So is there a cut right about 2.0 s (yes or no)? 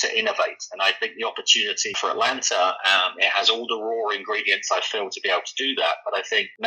yes